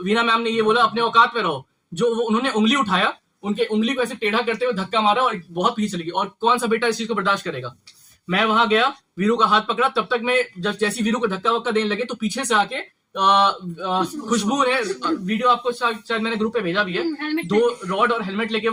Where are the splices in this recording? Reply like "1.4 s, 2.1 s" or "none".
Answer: none